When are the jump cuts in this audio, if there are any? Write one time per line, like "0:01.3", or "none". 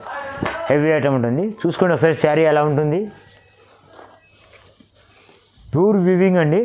none